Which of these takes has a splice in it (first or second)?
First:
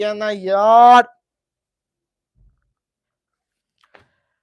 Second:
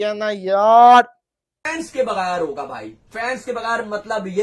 second